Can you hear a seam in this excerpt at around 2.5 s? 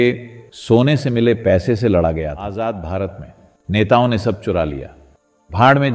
yes; 1 cut; at 2.5 s

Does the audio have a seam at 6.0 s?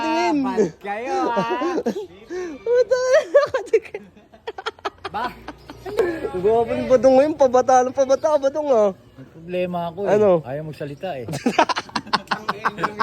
yes; 1 cut; at 6.0 s

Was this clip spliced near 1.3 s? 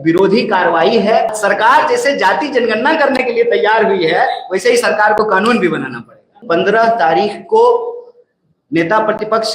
yes; 2 cuts; at 1.3 s, 6.3 s

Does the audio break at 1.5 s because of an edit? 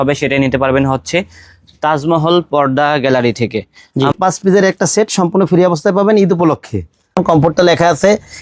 no; 2 cuts; at 4.1 s, 7.2 s

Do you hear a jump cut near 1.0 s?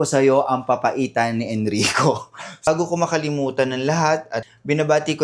no; 2 cuts; at 2.7 s, 4.4 s

